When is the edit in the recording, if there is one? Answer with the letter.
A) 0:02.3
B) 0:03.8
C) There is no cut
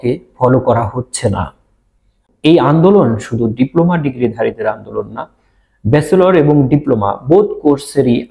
A